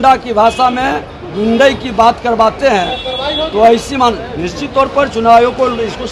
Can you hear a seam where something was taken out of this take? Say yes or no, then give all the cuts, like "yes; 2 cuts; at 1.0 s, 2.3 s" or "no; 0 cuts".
no; 0 cuts